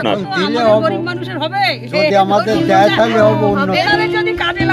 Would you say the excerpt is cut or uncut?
uncut